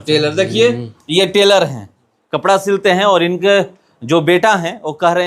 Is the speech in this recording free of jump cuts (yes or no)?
yes